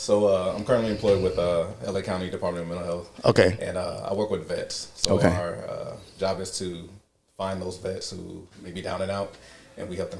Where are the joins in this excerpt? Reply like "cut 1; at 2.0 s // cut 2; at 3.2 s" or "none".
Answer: none